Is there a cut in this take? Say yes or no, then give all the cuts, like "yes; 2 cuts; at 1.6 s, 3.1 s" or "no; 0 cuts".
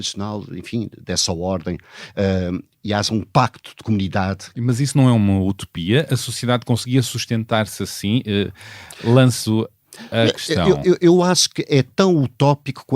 yes; 1 cut; at 4.6 s